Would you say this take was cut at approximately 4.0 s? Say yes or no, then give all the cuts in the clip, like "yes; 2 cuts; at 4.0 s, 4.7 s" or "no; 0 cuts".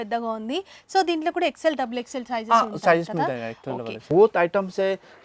yes; 1 cut; at 4.0 s